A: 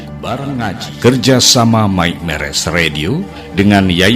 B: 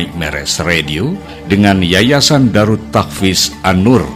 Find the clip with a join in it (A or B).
A